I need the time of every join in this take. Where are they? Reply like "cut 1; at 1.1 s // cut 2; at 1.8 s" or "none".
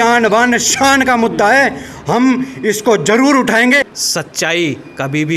cut 1; at 3.8 s